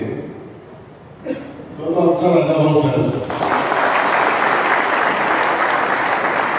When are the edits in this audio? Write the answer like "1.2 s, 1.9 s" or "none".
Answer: none